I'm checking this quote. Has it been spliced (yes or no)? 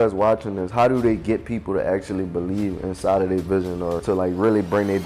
yes